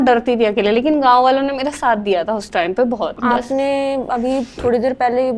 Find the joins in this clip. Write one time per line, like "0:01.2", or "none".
0:03.1